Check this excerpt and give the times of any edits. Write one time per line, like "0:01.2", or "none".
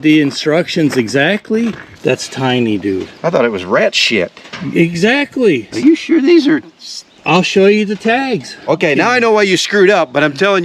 0:01.9
0:05.7
0:08.7